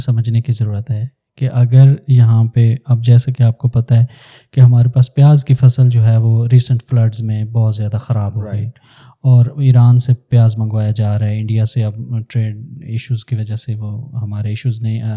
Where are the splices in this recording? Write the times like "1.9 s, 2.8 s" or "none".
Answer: none